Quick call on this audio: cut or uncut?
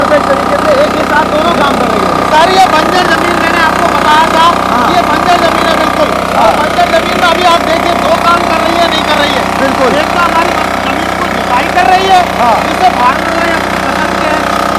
uncut